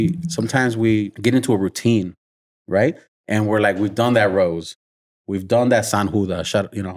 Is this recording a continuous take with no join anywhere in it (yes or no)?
no